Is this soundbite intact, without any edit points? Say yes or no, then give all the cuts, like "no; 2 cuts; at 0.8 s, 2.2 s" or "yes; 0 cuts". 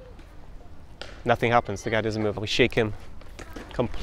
no; 1 cut; at 2.4 s